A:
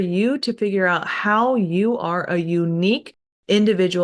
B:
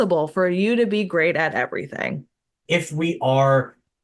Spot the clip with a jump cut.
B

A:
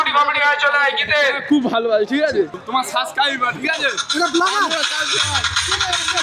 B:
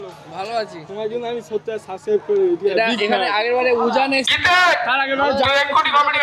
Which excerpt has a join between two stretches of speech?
A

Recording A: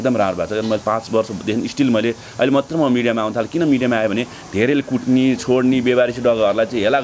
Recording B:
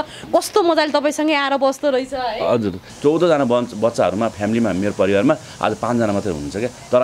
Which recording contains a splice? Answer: B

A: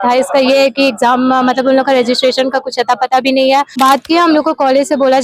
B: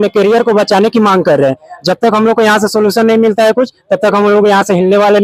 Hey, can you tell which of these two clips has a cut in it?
A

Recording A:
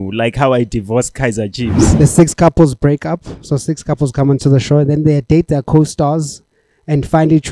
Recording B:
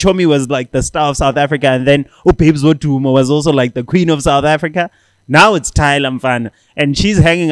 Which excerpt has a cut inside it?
A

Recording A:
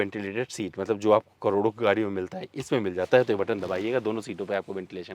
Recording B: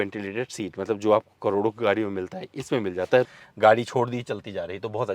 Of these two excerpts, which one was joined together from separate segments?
B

